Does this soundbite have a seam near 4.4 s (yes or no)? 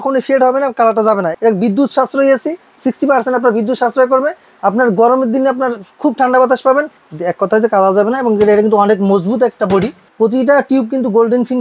no